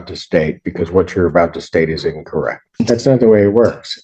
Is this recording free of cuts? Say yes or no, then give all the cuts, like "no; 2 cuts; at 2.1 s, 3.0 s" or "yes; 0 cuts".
no; 1 cut; at 2.7 s